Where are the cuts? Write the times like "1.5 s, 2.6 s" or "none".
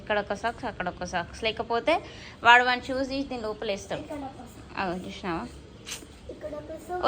none